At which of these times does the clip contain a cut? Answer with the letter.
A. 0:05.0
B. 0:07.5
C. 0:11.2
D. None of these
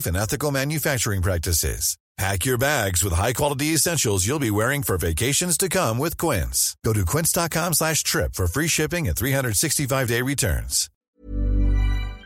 C